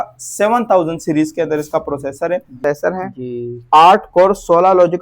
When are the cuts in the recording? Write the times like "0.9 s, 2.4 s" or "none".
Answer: 2.6 s